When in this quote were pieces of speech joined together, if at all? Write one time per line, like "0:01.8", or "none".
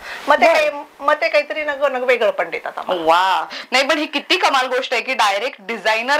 0:03.6